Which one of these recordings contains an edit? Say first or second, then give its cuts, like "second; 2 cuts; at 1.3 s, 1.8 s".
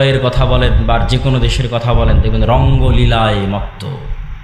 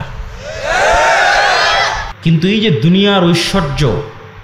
second; 1 cut; at 2.1 s